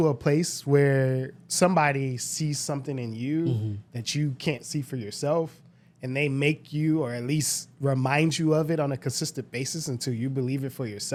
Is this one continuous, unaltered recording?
yes; 0 cuts

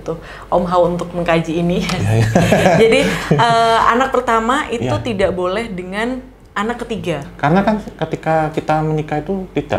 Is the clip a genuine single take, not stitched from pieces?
no; 1 cut; at 7.2 s

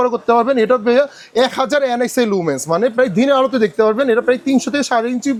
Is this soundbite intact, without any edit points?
yes; 0 cuts

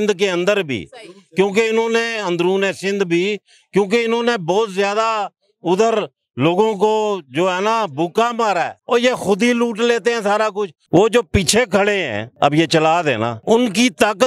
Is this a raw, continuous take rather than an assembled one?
no; 4 cuts; at 8.8 s, 10.7 s, 12.2 s, 13.3 s

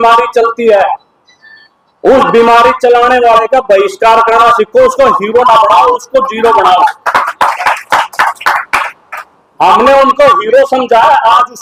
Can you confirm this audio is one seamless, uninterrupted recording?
yes; 0 cuts

